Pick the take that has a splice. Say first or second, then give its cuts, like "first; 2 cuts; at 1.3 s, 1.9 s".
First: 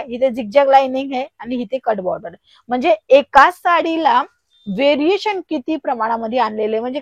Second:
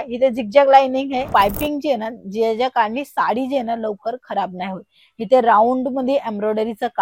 second; 1 cut; at 1.3 s